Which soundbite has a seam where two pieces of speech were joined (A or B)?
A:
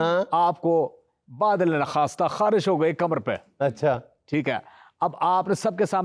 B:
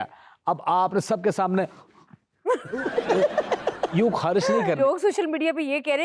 B